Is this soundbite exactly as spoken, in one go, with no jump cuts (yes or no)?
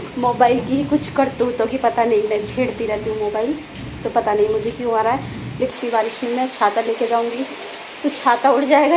no